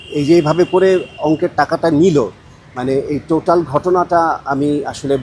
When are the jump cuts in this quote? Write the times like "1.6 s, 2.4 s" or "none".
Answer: none